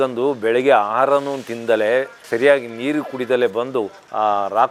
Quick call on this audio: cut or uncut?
uncut